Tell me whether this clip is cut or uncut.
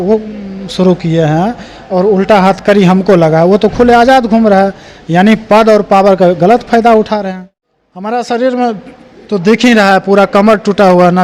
cut